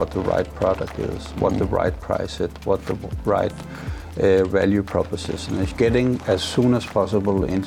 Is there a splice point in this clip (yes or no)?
yes